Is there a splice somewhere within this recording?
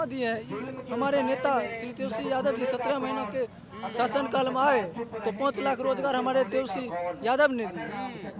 no; 0 cuts

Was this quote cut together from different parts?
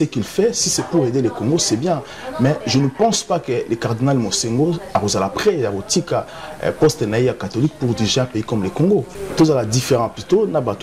yes; 1 cut; at 9.2 s

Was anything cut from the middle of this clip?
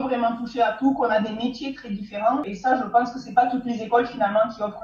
yes; 1 cut; at 2.5 s

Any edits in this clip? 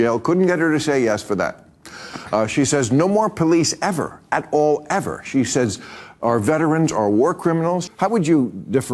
yes; 1 cut; at 7.8 s

